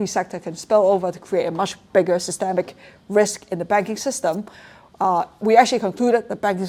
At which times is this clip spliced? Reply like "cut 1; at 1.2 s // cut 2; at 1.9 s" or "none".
none